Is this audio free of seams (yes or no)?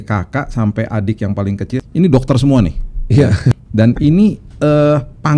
no